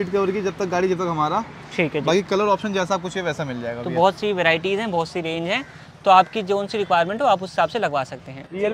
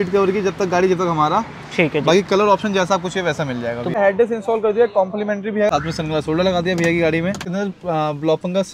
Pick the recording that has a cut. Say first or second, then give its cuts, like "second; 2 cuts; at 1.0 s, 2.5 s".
second; 3 cuts; at 4.0 s, 5.7 s, 7.5 s